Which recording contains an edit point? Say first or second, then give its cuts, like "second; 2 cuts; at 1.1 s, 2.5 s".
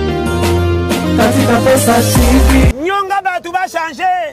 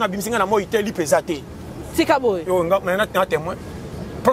first; 1 cut; at 2.7 s